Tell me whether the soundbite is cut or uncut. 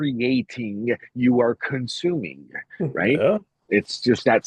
uncut